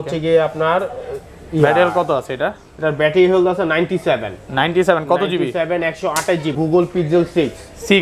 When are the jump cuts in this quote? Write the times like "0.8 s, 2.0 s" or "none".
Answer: 6.5 s